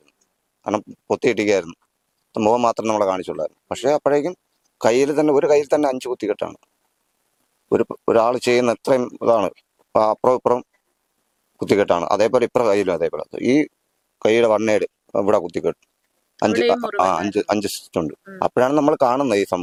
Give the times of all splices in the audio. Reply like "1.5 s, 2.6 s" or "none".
none